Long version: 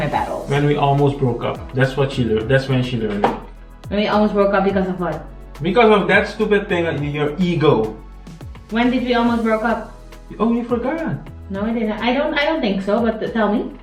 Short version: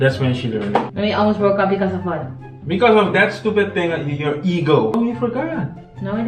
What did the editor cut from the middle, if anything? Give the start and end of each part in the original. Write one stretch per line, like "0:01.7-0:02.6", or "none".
0:03.4-0:03.9
0:07.9-0:10.4